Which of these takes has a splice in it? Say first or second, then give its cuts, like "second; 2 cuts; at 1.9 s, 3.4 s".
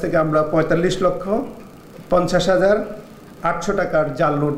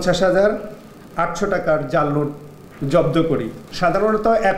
second; 1 cut; at 3.6 s